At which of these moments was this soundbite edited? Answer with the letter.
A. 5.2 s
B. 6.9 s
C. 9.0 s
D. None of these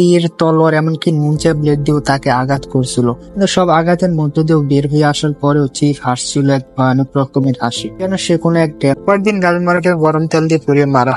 C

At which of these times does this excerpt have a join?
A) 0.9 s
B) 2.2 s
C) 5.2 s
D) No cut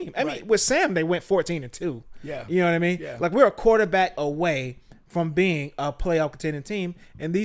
D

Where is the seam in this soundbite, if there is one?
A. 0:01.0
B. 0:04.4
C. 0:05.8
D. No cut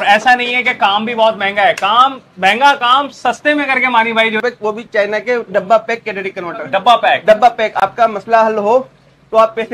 B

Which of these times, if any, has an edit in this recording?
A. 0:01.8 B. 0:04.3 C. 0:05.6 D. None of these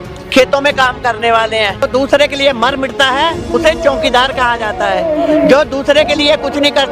A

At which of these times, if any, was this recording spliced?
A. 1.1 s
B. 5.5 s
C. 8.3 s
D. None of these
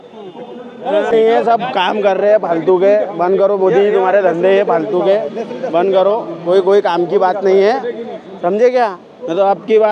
A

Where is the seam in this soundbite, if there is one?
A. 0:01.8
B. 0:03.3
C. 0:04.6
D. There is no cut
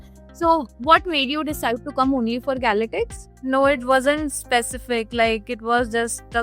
B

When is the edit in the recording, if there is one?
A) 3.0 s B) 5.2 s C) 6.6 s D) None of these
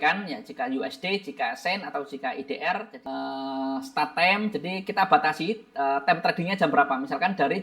A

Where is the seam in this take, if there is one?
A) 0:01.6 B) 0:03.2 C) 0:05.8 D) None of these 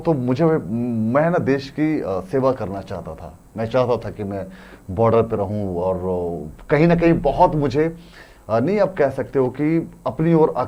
D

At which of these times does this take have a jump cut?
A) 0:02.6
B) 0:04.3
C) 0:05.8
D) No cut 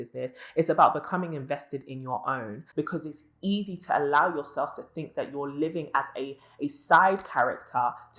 A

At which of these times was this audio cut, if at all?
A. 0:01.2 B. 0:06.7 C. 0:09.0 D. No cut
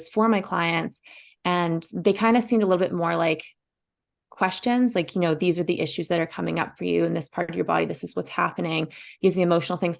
D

